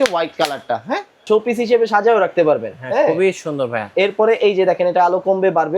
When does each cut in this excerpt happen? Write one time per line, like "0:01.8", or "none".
0:01.2